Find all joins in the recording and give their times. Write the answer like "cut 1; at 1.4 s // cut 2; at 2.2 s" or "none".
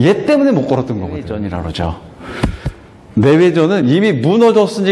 cut 1; at 1.2 s